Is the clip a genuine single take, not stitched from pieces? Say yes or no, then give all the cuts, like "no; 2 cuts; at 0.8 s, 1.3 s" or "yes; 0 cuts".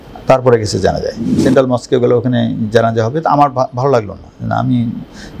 no; 1 cut; at 1.4 s